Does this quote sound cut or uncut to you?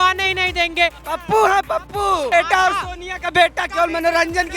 cut